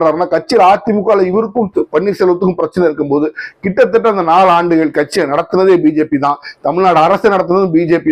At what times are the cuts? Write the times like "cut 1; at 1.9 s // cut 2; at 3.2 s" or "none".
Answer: none

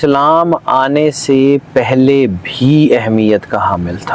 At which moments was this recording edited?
none

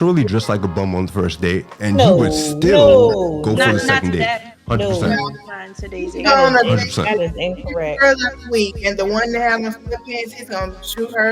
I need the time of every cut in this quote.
none

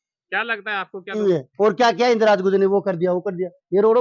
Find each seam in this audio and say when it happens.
cut 1; at 1.2 s

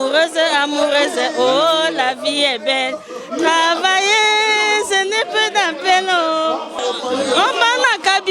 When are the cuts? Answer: cut 1; at 6.7 s

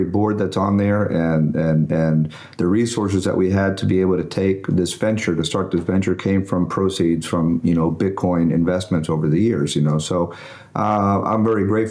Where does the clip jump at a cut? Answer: none

